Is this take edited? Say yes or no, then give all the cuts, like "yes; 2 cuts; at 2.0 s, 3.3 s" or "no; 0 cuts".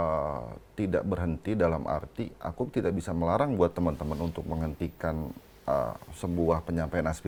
no; 0 cuts